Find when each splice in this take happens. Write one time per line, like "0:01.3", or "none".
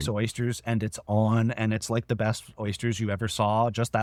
none